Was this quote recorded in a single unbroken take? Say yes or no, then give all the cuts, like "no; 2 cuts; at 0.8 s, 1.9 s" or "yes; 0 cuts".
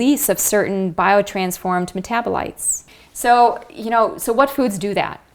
yes; 0 cuts